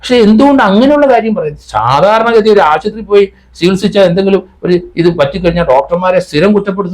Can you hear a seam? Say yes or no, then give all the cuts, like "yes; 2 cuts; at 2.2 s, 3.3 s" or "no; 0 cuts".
no; 0 cuts